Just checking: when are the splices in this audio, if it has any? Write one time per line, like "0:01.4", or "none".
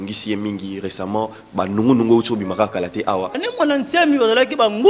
0:03.4